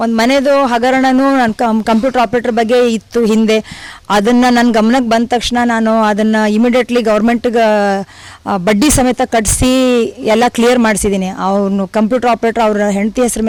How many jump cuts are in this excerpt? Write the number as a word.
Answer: zero